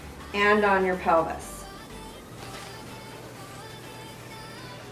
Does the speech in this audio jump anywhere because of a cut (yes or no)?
yes